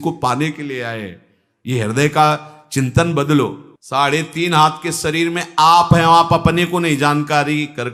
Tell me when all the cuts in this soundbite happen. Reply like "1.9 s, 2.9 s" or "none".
3.6 s